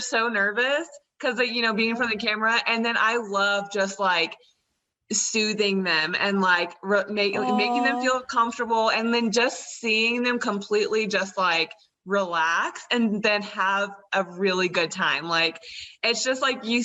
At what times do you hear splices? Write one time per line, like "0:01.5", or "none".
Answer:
none